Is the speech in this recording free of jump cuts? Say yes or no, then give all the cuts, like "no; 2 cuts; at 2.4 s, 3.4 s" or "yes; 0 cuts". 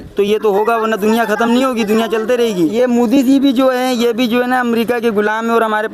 no; 1 cut; at 2.7 s